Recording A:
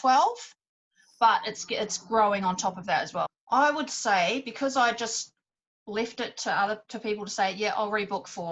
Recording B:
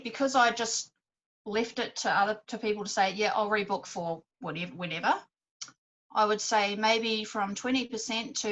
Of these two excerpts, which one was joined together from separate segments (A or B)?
A